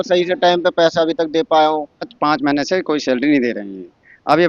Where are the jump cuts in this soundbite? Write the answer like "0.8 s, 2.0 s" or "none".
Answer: 2.1 s